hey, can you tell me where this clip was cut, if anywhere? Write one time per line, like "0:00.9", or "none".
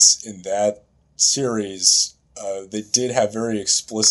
none